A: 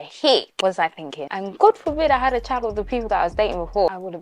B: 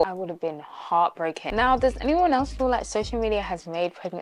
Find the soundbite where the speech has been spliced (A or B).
B